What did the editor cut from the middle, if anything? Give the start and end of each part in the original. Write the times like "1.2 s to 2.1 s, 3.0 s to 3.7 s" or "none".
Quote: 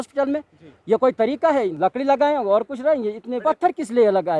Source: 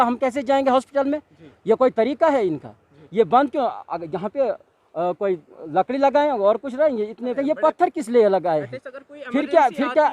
2.5 s to 5.7 s, 7.3 s to 7.6 s